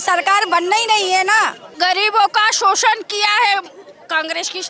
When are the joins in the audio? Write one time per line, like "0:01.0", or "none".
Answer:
0:01.7